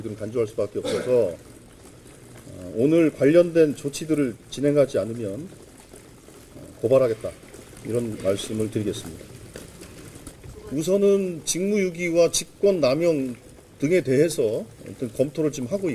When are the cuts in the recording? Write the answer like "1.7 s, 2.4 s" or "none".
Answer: 10.5 s

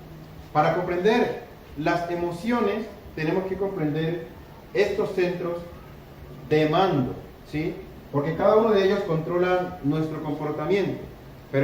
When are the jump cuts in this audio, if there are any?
5.3 s

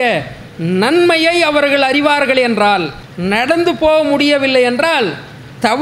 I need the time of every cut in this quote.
3.0 s

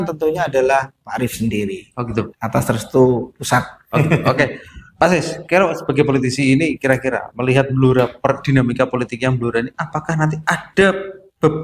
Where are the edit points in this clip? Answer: none

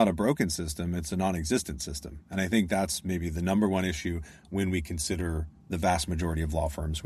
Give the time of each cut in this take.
none

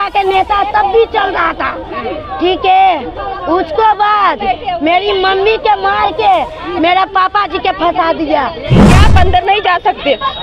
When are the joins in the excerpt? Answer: 8.8 s

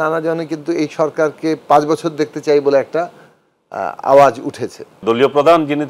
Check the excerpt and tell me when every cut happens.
5.0 s

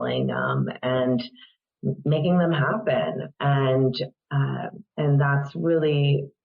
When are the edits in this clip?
4.8 s

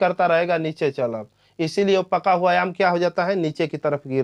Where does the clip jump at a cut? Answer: 2.0 s

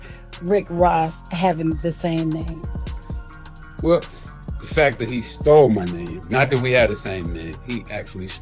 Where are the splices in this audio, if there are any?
none

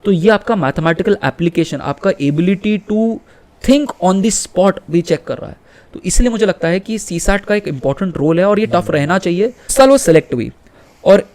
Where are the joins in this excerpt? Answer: 9.7 s

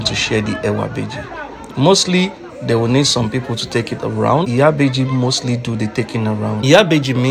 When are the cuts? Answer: none

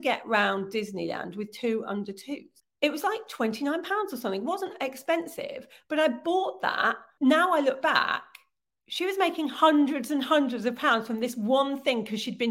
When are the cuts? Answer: 2.6 s, 7.1 s

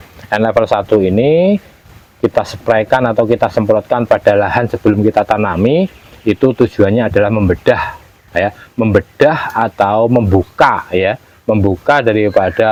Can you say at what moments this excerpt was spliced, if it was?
none

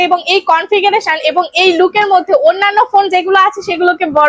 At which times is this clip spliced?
none

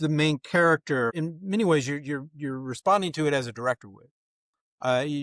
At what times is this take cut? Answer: 1.1 s

